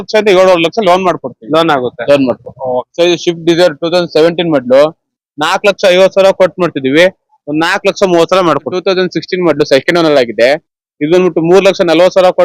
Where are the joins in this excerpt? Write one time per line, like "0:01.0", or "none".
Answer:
0:02.8
0:08.7